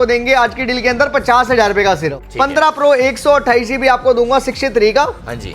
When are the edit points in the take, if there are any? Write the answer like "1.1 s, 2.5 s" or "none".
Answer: 2.2 s